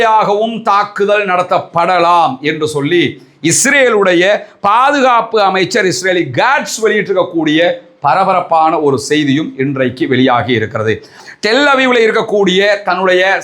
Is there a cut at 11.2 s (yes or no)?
yes